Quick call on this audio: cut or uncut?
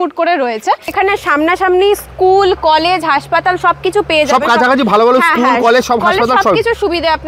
cut